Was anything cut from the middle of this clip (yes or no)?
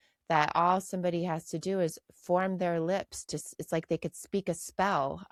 no